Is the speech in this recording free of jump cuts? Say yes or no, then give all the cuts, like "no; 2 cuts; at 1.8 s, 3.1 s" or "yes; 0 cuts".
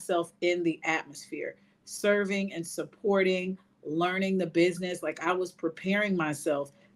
yes; 0 cuts